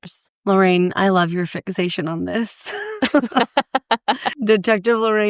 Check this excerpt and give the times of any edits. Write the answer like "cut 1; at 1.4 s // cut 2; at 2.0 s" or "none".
cut 1; at 4.3 s